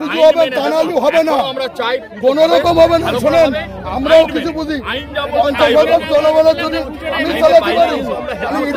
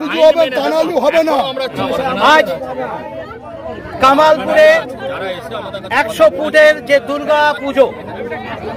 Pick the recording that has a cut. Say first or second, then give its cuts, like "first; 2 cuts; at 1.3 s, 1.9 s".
second; 1 cut; at 1.7 s